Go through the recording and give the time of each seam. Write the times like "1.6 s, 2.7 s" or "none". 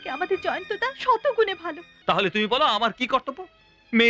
1.8 s